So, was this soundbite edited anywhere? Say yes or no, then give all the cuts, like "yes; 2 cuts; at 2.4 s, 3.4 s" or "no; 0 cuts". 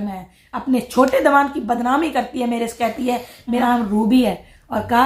yes; 1 cut; at 3.6 s